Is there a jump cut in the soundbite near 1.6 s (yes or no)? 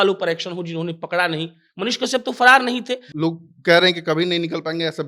no